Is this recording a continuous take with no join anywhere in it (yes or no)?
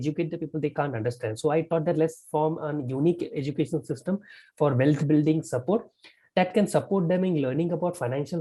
yes